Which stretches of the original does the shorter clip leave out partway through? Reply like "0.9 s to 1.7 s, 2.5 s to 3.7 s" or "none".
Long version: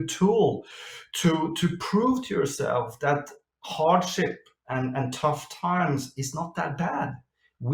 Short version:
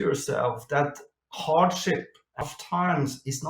4.7 s to 5.3 s